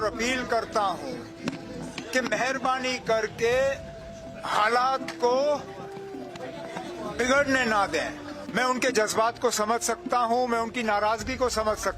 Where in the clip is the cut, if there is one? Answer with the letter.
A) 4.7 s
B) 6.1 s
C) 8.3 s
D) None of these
C